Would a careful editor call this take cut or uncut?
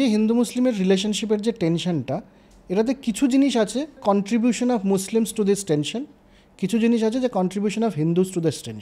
cut